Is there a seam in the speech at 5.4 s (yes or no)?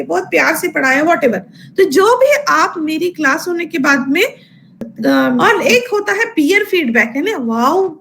yes